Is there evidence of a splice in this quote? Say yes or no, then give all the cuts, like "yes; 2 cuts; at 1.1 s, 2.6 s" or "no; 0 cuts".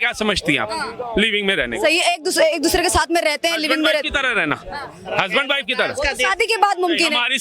no; 0 cuts